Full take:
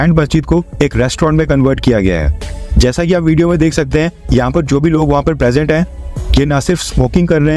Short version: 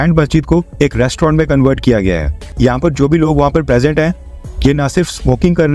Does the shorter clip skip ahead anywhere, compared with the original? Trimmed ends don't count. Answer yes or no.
yes